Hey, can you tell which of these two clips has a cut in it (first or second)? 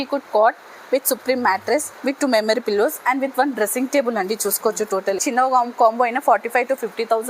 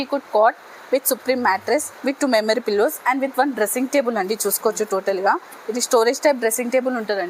first